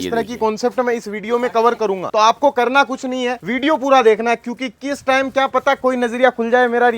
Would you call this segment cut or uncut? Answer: cut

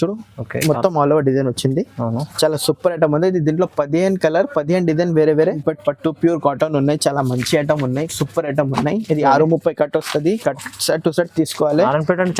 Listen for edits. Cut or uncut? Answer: cut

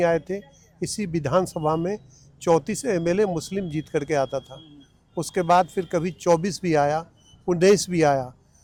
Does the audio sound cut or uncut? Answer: uncut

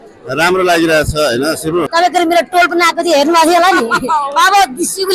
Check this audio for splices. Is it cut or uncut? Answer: cut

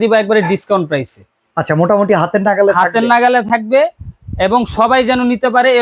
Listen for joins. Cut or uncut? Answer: uncut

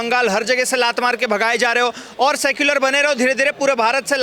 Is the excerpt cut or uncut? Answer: uncut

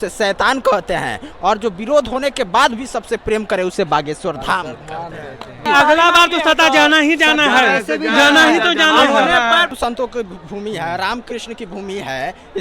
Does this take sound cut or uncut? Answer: cut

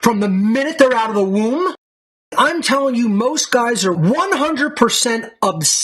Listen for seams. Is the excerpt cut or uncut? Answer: cut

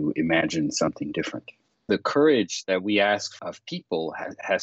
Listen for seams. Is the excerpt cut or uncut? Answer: cut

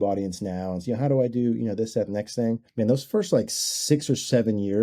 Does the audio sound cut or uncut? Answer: cut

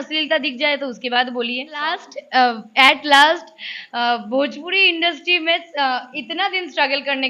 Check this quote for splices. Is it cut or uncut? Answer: cut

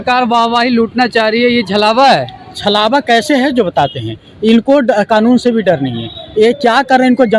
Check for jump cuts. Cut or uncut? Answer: uncut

